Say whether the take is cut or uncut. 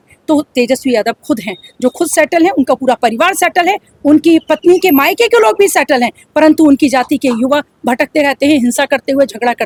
uncut